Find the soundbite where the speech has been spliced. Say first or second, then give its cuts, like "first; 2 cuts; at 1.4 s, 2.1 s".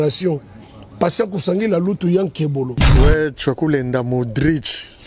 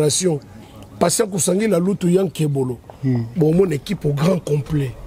first; 1 cut; at 2.8 s